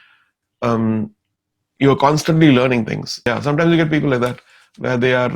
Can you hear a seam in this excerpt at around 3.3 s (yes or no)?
yes